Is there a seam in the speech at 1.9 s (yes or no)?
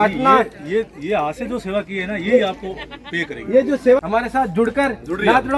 no